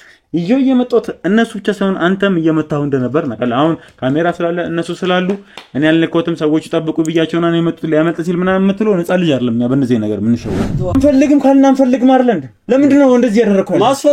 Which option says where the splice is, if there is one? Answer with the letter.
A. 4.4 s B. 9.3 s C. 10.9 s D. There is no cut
C